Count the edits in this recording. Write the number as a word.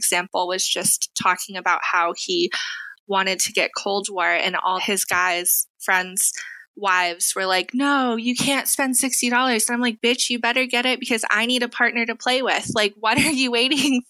zero